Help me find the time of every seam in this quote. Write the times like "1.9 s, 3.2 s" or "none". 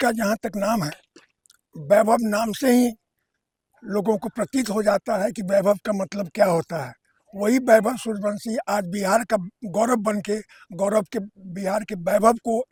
none